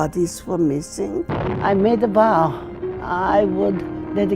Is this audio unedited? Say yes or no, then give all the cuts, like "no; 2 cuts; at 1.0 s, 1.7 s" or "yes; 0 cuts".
no; 1 cut; at 1.3 s